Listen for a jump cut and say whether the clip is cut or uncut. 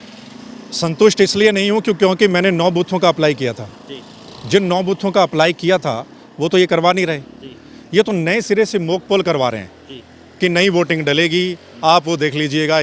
uncut